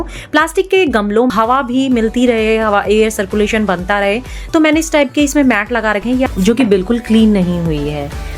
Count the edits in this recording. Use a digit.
2